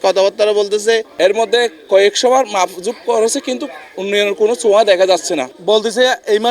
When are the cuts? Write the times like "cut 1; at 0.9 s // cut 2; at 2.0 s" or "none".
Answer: cut 1; at 1.1 s // cut 2; at 5.5 s